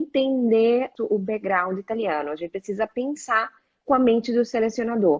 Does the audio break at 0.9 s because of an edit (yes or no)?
yes